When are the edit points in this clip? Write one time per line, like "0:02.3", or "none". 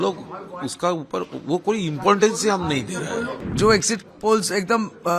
0:03.3